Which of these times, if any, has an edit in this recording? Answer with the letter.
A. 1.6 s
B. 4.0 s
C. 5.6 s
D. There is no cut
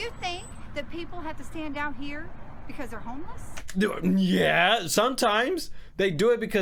D